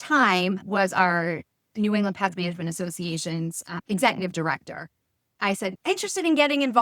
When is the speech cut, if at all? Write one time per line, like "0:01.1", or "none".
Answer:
0:03.8
0:05.4